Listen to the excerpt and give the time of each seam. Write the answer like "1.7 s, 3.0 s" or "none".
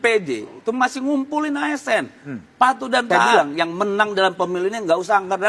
3.3 s